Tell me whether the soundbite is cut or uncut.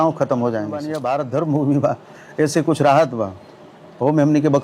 cut